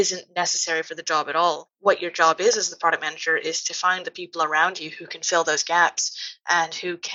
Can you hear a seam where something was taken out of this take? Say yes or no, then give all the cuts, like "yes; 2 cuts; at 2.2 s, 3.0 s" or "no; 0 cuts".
no; 0 cuts